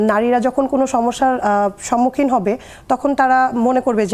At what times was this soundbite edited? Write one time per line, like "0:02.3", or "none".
none